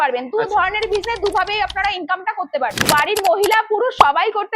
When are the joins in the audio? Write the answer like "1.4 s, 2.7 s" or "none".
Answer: 2.9 s